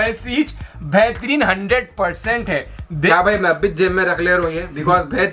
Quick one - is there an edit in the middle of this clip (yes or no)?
yes